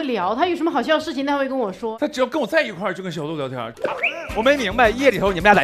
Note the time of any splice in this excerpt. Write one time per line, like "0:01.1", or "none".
0:01.9
0:03.7